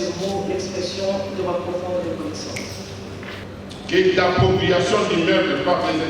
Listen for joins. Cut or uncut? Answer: cut